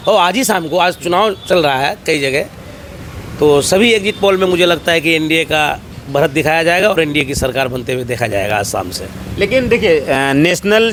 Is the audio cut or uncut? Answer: uncut